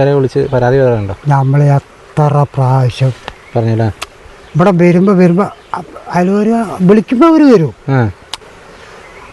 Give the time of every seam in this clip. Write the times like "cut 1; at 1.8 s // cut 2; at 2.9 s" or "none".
none